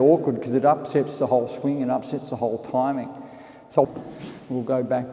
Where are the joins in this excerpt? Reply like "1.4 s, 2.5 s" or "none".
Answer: 3.9 s

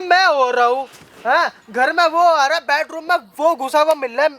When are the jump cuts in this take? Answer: none

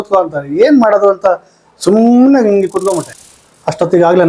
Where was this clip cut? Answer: 3.1 s

